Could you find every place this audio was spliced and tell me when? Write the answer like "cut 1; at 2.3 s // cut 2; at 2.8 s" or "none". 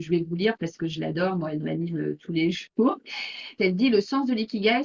cut 1; at 3.6 s